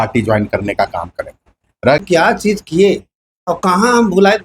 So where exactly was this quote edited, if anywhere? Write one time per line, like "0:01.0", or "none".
0:02.0